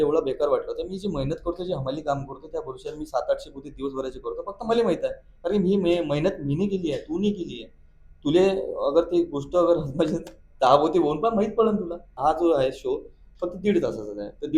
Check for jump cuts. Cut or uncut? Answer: cut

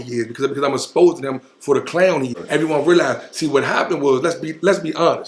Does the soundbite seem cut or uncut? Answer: cut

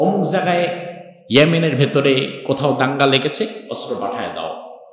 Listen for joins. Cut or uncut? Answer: uncut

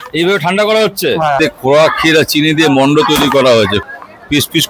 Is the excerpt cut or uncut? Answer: cut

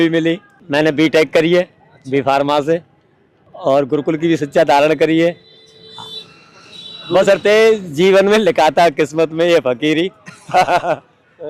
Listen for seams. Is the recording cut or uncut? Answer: uncut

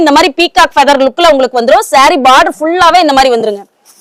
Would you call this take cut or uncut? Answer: uncut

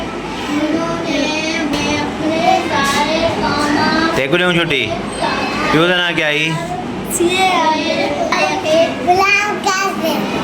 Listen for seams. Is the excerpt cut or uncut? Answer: cut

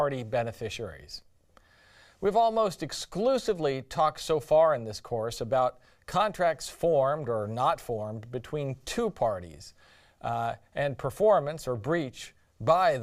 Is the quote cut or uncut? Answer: cut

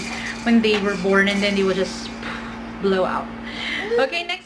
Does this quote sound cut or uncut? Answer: uncut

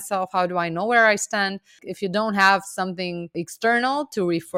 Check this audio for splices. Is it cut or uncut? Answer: cut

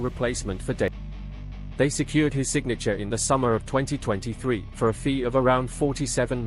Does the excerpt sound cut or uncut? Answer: cut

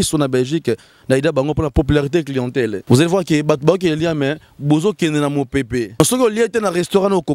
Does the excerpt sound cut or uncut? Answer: cut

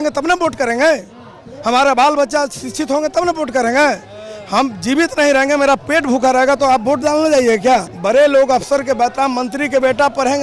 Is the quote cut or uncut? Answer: uncut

